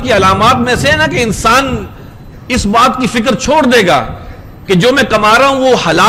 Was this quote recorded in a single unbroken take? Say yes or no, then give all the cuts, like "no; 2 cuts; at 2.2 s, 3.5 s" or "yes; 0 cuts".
yes; 0 cuts